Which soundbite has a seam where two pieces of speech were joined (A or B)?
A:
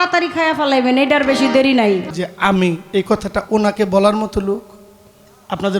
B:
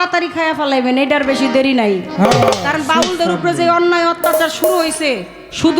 A